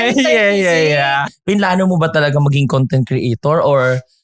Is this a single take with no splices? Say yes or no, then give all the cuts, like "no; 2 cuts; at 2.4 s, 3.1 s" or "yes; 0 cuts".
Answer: no; 1 cut; at 1.3 s